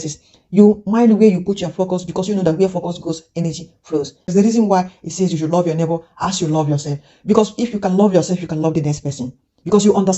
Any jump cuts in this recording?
yes; 1 cut; at 4.3 s

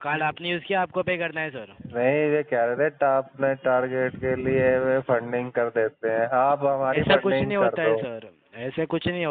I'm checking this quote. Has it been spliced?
no; 0 cuts

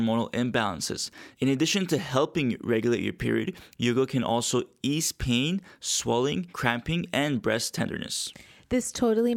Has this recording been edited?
yes; 1 cut; at 6.5 s

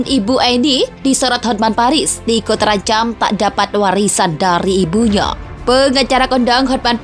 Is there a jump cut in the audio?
yes; 1 cut; at 5.5 s

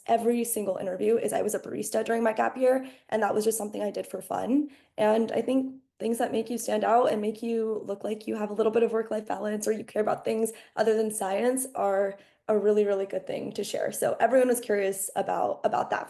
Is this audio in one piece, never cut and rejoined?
yes; 0 cuts

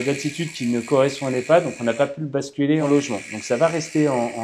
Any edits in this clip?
yes; 1 cut; at 2.8 s

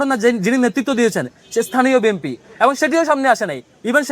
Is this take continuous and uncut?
yes; 0 cuts

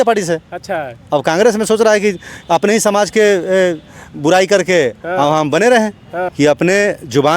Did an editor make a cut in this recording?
yes; 1 cut; at 6.3 s

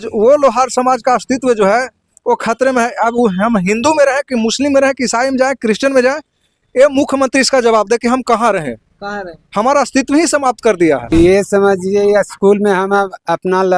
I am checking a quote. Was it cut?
yes; 1 cut; at 11.0 s

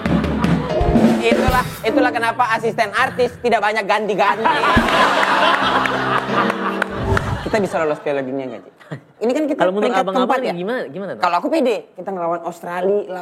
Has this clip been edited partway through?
yes; 3 cuts; at 7.3 s, 9.1 s, 11.9 s

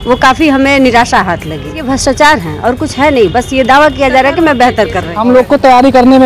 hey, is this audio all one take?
no; 2 cuts; at 1.8 s, 5.1 s

